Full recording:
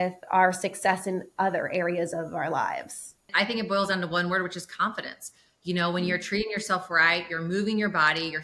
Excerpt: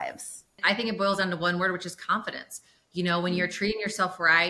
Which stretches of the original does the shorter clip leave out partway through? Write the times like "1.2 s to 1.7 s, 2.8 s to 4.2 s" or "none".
none